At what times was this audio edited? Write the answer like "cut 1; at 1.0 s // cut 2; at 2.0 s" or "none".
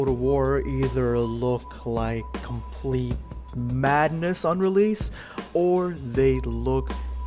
cut 1; at 3.2 s